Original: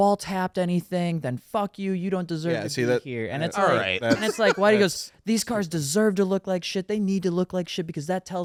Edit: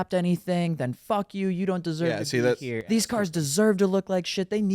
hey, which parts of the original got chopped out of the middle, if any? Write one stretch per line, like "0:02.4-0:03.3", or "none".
0:03.2-0:05.1